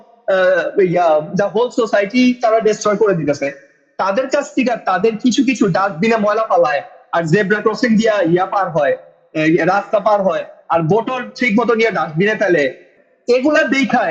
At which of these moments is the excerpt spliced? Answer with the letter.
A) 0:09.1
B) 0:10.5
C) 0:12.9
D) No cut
C